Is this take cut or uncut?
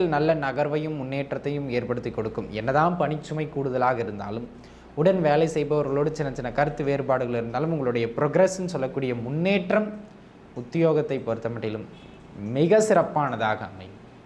uncut